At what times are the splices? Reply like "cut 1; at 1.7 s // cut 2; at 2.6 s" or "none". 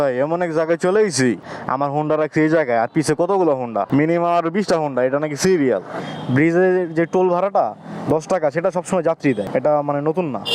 cut 1; at 1.5 s // cut 2; at 3.9 s // cut 3; at 6.0 s // cut 4; at 9.5 s